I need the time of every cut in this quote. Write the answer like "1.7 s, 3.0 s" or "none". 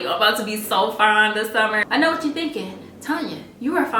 1.8 s

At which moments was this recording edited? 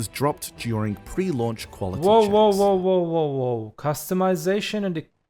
none

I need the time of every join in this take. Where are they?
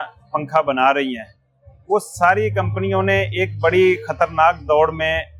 none

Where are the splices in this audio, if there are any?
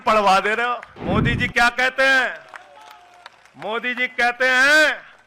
0.9 s

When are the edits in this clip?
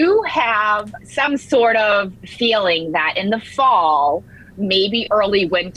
0.9 s

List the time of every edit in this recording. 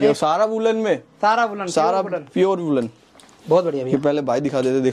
none

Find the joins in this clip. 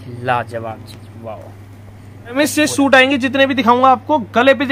2.4 s

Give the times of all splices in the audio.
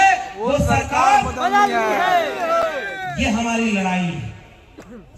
none

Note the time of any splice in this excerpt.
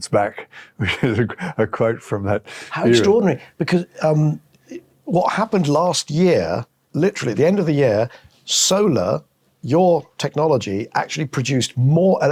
6.8 s

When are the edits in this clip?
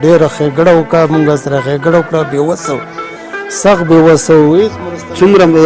none

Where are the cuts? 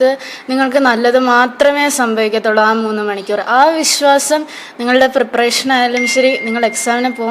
none

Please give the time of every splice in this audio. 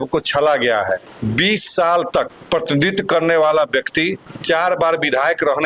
1.1 s, 2.4 s, 4.3 s

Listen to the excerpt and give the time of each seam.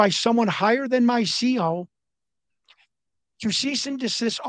none

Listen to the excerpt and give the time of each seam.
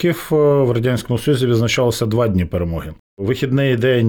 3.2 s

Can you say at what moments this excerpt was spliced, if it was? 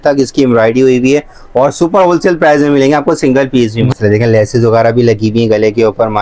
3.9 s

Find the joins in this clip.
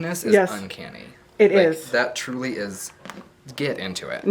none

